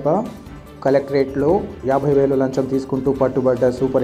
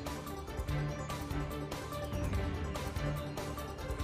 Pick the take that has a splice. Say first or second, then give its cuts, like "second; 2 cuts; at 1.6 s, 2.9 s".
second; 2 cuts; at 2.6 s, 3.3 s